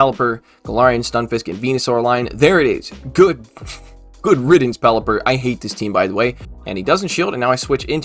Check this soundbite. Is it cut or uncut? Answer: cut